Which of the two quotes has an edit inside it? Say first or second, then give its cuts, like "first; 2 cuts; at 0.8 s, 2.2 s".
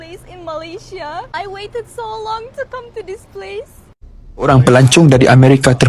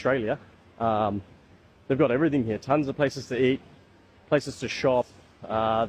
first; 1 cut; at 4.5 s